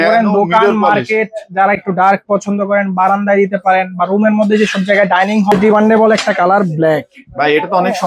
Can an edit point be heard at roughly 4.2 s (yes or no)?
no